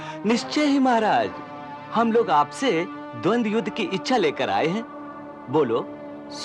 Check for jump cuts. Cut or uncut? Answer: uncut